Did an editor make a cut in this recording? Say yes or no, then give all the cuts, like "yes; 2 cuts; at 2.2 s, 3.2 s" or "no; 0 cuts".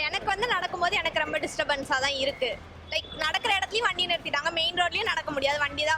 no; 0 cuts